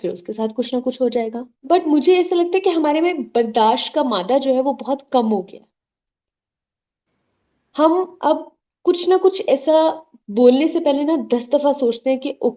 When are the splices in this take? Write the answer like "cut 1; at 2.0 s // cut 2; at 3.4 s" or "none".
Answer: cut 1; at 1.5 s